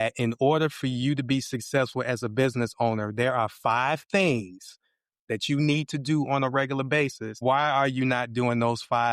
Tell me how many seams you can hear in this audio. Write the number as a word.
one